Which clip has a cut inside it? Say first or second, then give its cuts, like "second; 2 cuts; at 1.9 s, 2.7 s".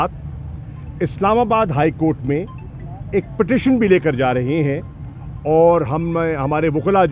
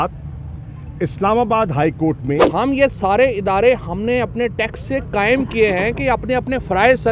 second; 1 cut; at 2.5 s